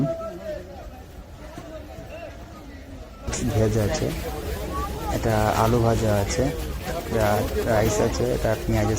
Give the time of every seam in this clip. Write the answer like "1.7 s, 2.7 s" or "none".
3.3 s